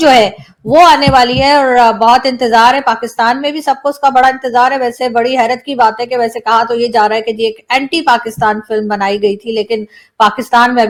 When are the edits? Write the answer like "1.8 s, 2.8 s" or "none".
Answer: none